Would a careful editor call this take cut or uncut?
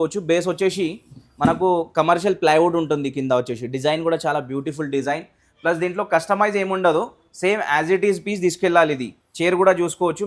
uncut